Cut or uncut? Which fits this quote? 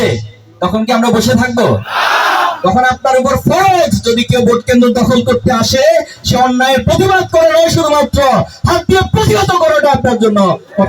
uncut